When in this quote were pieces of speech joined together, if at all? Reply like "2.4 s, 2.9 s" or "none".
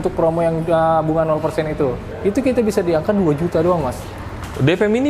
2.1 s